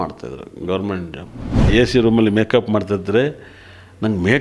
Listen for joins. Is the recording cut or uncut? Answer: cut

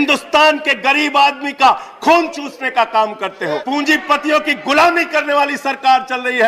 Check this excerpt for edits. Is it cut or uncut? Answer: cut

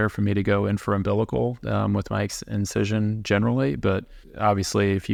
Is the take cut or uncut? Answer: uncut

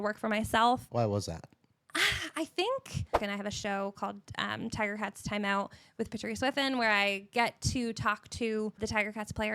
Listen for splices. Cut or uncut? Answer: cut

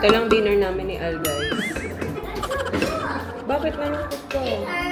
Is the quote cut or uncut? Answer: uncut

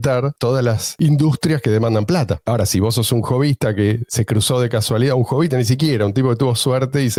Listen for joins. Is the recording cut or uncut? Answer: uncut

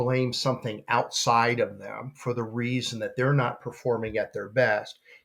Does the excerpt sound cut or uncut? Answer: uncut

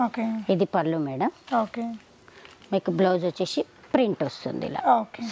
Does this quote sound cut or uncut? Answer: uncut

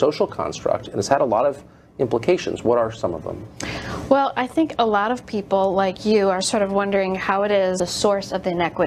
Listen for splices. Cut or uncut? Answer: uncut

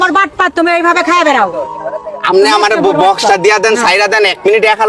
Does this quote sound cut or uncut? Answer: uncut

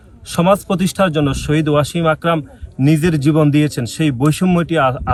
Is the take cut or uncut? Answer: uncut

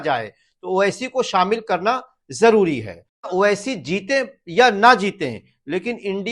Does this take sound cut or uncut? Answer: cut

